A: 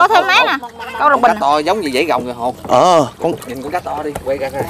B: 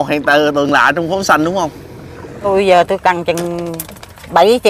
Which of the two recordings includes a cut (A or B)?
B